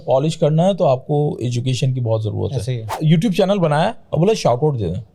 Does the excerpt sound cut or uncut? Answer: cut